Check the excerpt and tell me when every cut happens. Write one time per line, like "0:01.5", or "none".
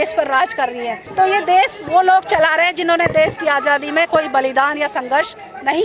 0:01.0